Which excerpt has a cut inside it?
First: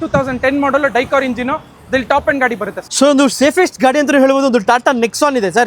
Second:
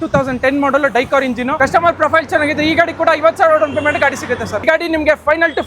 second; 2 cuts; at 1.5 s, 4.6 s

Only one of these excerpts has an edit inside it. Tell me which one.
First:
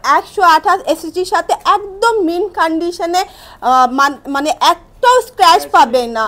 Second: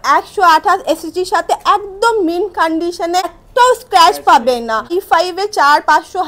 second; 2 cuts; at 3.4 s, 4.9 s

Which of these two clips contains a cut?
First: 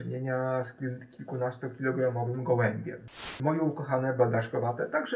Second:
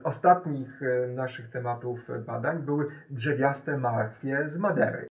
first; 1 cut; at 3.4 s

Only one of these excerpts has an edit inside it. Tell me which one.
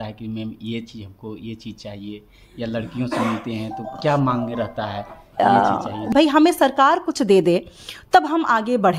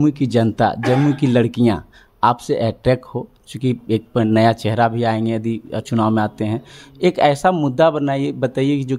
first; 1 cut; at 6.1 s

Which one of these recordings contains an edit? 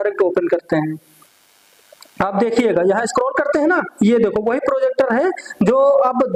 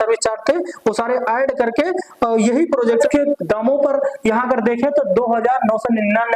second; 1 cut; at 3.0 s

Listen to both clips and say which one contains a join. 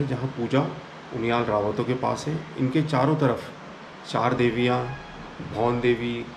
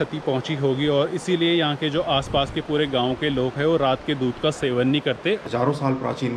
second; 1 cut; at 5.4 s

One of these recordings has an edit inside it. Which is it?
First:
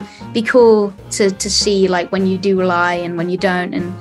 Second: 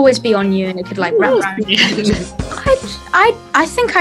second; 1 cut; at 2.4 s

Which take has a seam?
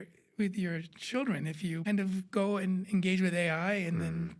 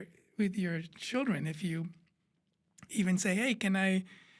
first; 1 cut; at 1.8 s

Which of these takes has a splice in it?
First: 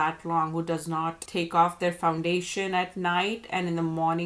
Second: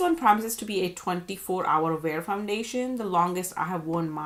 first; 1 cut; at 1.2 s

